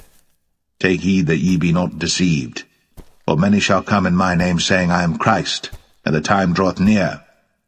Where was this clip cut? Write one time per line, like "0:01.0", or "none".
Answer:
0:03.2